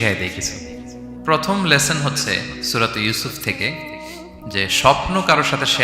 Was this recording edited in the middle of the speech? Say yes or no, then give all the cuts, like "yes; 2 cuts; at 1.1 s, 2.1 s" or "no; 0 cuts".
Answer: yes; 1 cut; at 1.1 s